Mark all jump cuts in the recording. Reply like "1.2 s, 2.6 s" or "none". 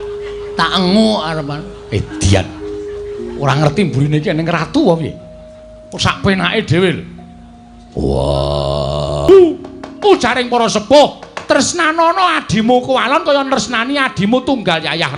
9.3 s